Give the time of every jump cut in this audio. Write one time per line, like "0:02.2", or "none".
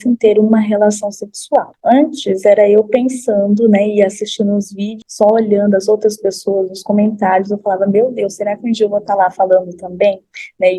0:01.7
0:05.0